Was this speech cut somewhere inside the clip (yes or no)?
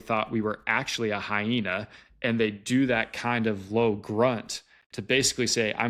no